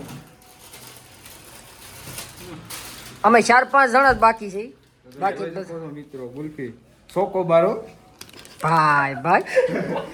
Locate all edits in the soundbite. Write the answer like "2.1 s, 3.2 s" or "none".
none